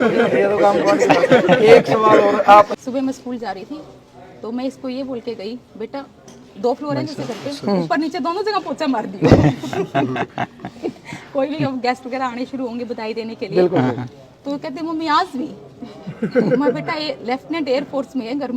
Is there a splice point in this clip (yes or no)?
yes